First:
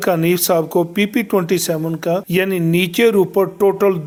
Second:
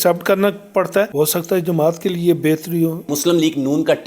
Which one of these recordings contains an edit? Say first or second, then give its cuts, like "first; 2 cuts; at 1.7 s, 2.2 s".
second; 2 cuts; at 1.1 s, 3.1 s